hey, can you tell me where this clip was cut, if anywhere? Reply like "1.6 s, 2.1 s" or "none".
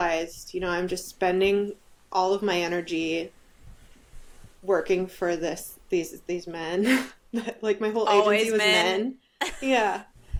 none